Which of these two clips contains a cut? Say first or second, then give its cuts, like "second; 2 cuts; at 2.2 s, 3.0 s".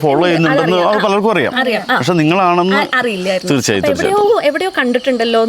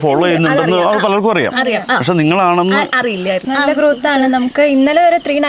second; 1 cut; at 3.4 s